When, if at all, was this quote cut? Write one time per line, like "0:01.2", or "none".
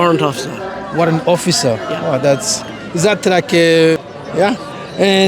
0:04.0